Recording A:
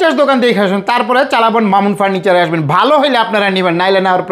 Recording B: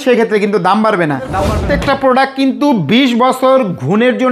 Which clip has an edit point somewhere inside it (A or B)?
B